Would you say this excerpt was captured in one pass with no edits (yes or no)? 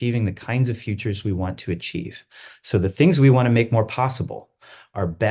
yes